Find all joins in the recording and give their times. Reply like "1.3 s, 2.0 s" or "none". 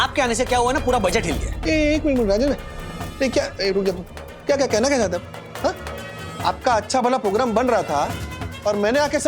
1.4 s